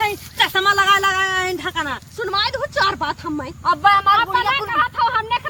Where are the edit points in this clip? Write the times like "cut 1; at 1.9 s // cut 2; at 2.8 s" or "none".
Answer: none